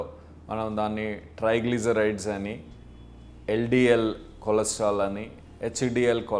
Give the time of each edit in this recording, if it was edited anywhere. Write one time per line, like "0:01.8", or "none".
none

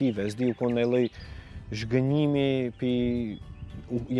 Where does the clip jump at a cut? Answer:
none

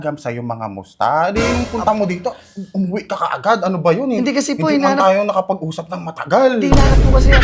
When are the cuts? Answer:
none

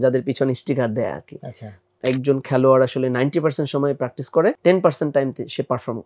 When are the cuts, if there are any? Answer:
0:01.9
0:04.6

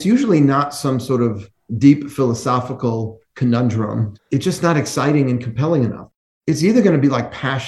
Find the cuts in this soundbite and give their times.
0:04.1
0:06.0

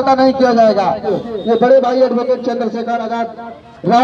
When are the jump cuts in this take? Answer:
0:01.2

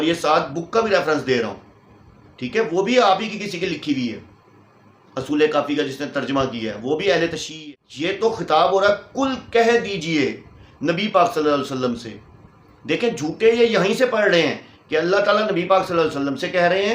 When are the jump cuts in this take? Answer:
0:07.5

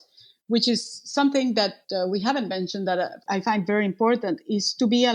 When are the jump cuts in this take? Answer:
0:01.8
0:03.2

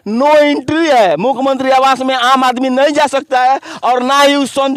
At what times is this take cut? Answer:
none

